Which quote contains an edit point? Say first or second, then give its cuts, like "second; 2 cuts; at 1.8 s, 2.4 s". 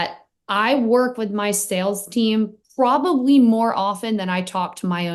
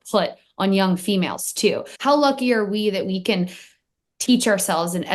second; 1 cut; at 1.9 s